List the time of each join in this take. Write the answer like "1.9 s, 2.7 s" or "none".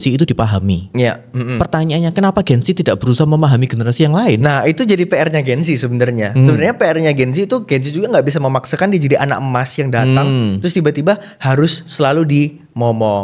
none